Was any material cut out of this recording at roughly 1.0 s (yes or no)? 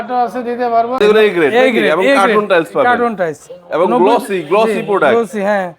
yes